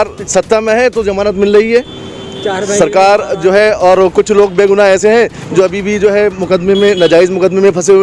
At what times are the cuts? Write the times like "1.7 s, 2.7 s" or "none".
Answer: none